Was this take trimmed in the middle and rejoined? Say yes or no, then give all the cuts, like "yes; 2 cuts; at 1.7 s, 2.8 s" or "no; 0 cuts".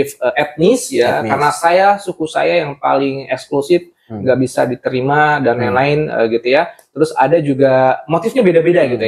no; 0 cuts